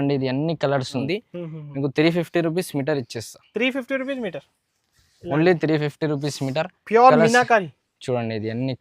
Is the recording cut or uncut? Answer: cut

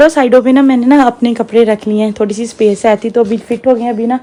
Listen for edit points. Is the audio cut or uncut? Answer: uncut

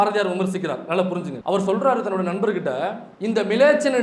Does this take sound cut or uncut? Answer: cut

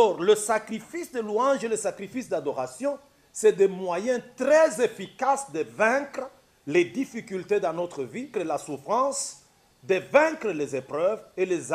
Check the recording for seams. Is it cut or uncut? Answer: cut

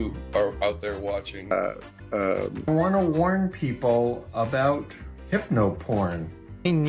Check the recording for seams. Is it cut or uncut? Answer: cut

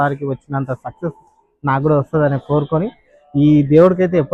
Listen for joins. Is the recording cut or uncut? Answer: uncut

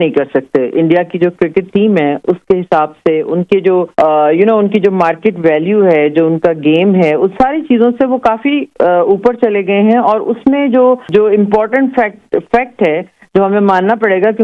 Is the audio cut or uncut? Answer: uncut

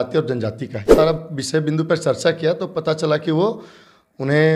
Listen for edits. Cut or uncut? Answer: cut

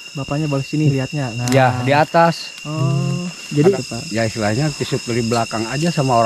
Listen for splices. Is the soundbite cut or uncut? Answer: cut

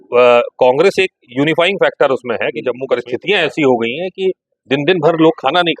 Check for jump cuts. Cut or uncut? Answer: cut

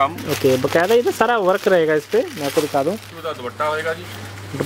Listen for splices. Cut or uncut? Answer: cut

